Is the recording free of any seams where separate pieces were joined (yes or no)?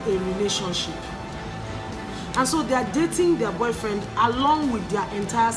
yes